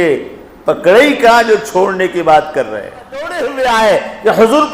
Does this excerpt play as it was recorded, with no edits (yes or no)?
no